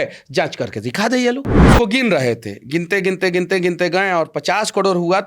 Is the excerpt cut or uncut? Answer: cut